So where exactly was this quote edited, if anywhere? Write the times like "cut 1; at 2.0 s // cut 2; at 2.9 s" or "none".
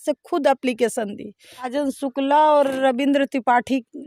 cut 1; at 1.7 s

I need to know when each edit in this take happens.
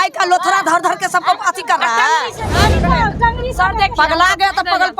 cut 1; at 2.6 s

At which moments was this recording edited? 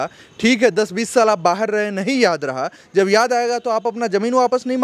none

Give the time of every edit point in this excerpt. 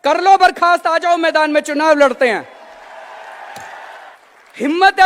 cut 1; at 4.1 s

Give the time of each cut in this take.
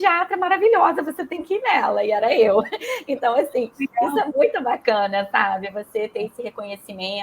none

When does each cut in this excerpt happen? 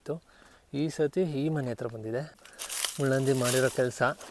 cut 1; at 2.4 s

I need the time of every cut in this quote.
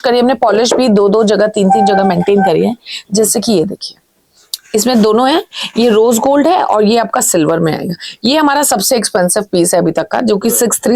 none

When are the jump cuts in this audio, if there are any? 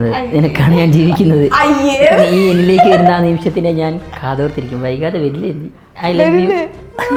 none

